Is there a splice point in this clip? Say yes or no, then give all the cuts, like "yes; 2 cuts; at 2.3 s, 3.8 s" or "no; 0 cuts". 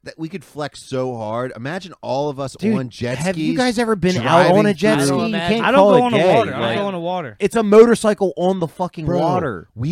yes; 1 cut; at 7.3 s